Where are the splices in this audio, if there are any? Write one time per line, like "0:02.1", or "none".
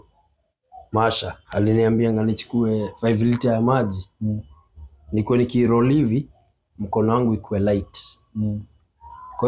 0:01.4